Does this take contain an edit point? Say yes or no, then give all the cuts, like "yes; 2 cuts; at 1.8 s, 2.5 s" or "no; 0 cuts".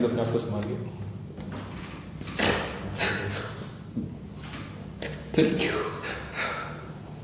yes; 1 cut; at 1.4 s